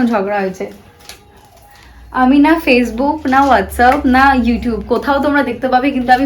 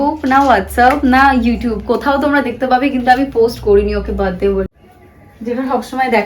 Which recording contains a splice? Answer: second; 1 cut; at 4.7 s

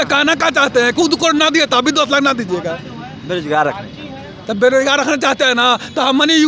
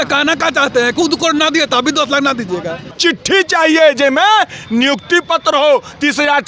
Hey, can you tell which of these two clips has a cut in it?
second; 1 cut; at 3.0 s

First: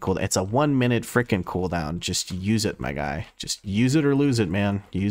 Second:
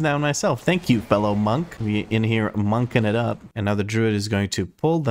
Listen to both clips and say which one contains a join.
second; 1 cut; at 3.5 s

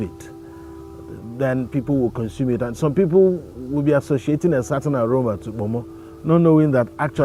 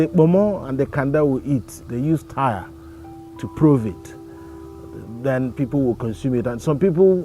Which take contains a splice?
second; 1 cut; at 1.7 s

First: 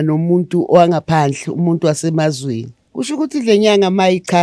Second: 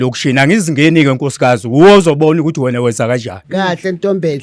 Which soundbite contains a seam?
second; 1 cut; at 3.3 s

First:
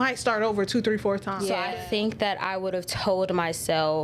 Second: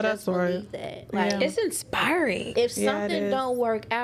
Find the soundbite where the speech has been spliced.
first; 1 cut; at 1.6 s

